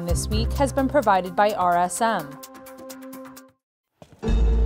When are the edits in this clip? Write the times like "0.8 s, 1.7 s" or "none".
2.3 s, 3.4 s